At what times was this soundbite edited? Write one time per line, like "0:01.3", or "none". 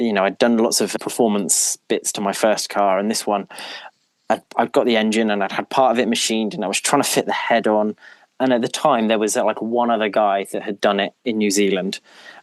none